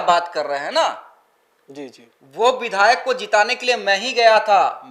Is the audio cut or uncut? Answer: uncut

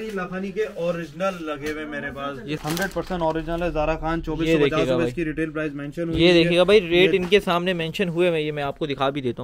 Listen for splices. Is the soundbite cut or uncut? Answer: cut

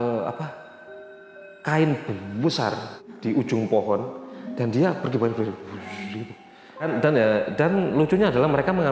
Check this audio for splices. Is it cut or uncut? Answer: cut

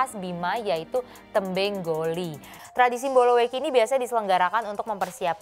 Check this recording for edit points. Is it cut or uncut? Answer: cut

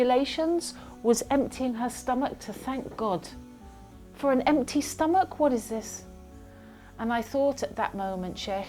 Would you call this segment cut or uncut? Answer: uncut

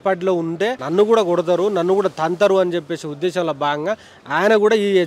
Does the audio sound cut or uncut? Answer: uncut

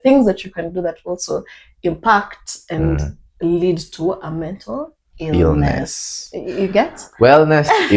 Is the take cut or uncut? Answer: uncut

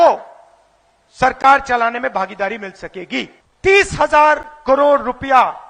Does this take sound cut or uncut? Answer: cut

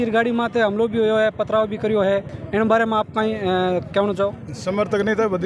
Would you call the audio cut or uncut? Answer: uncut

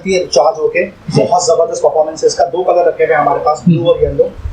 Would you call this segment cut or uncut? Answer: uncut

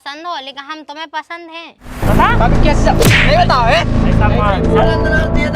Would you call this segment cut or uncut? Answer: cut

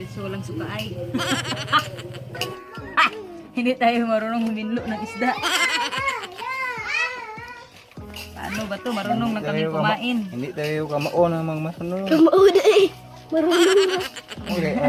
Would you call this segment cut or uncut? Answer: cut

